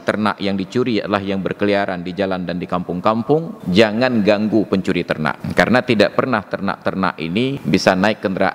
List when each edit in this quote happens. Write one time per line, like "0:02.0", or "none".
0:03.6
0:05.4
0:07.6